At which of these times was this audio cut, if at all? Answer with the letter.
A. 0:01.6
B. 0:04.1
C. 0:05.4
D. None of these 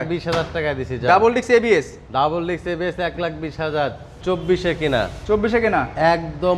B